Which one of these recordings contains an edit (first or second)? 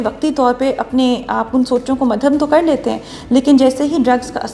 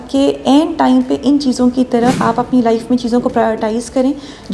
second